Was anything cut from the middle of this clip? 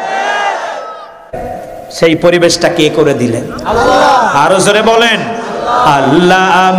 yes; 1 cut; at 1.4 s

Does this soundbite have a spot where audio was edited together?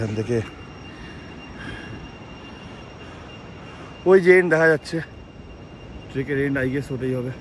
no; 0 cuts

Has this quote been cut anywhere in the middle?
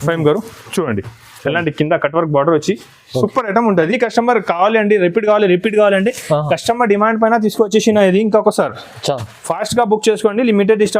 yes; 1 cut; at 3.9 s

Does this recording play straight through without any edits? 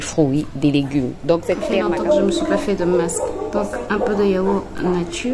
no; 1 cut; at 1.7 s

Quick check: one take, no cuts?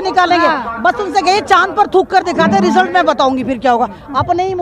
yes; 0 cuts

